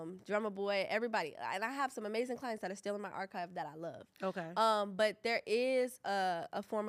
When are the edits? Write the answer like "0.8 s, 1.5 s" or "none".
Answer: none